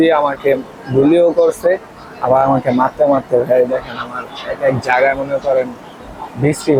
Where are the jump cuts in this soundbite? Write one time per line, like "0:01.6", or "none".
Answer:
none

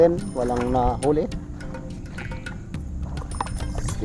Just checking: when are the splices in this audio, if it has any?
none

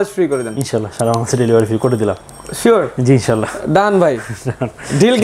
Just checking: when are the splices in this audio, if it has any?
none

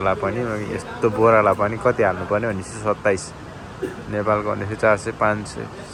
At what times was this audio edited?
none

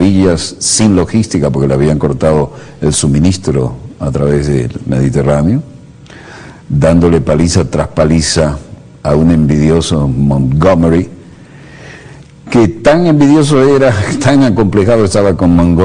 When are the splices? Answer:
0:07.7

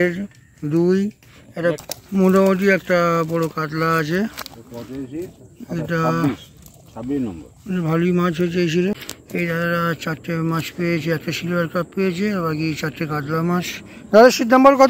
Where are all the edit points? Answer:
0:01.8
0:08.9

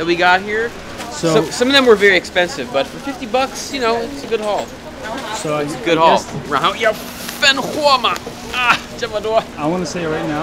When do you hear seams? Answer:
0:06.4
0:09.5

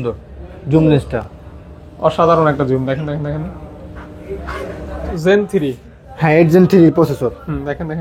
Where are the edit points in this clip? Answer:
0:05.1

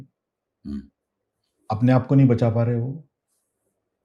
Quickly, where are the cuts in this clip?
none

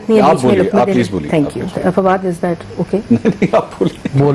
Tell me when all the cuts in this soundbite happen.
none

